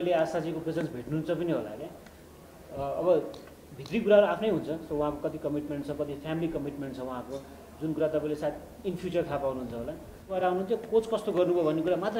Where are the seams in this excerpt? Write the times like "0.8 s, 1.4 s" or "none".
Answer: 10.4 s